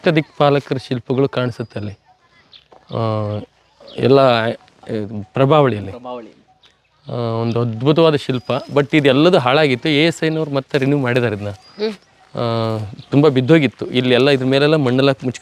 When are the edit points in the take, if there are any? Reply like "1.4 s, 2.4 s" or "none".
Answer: none